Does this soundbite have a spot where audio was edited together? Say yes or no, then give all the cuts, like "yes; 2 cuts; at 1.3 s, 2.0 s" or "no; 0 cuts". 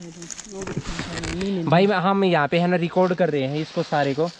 no; 0 cuts